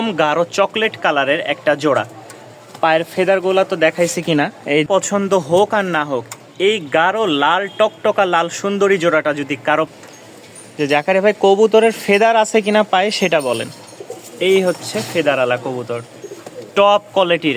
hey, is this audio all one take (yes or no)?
no